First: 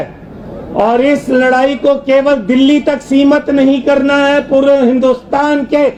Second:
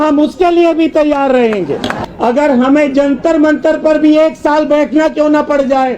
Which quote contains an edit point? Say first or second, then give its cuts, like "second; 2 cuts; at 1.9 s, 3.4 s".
second; 1 cut; at 2.0 s